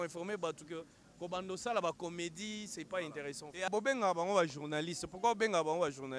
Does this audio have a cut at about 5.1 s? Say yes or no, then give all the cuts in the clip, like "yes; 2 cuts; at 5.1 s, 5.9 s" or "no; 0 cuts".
no; 1 cut; at 3.7 s